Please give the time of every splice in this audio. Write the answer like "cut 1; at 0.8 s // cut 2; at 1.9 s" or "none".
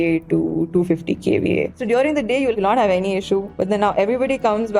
cut 1; at 2.2 s // cut 2; at 3.5 s

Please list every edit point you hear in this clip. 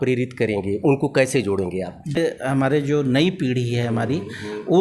cut 1; at 2.2 s

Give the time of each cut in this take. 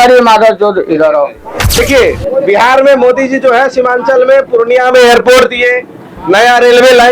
cut 1; at 1.7 s

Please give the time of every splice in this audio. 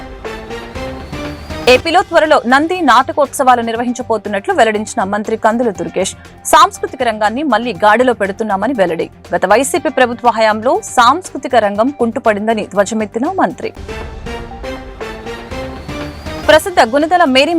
cut 1; at 1.6 s

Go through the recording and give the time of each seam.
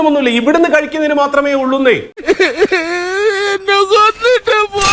none

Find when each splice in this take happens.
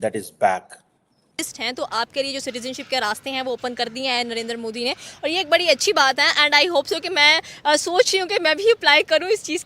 cut 1; at 1.5 s

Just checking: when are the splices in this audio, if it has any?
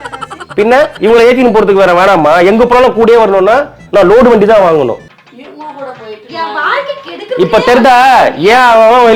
cut 1; at 5.1 s

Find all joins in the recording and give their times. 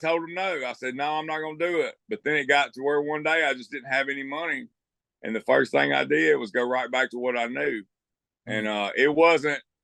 none

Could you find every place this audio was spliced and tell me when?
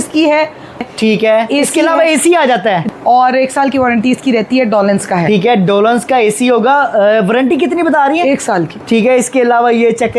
cut 1; at 0.8 s // cut 2; at 2.9 s // cut 3; at 8.8 s

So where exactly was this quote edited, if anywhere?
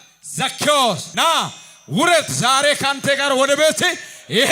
cut 1; at 1.1 s

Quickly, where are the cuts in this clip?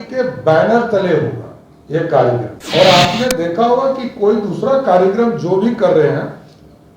cut 1; at 2.6 s

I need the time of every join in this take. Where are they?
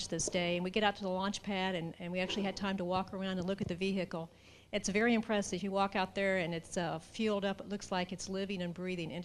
cut 1; at 5.6 s

